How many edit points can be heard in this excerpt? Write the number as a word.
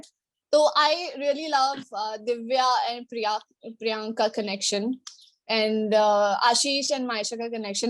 zero